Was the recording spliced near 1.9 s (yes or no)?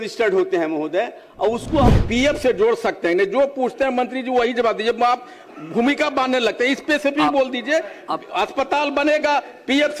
yes